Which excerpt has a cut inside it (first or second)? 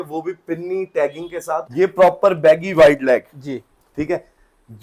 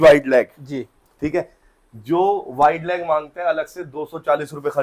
first